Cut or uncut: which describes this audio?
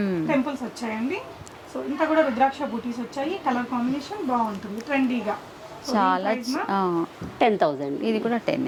uncut